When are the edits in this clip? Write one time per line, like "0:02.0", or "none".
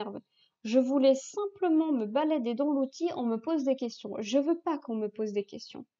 none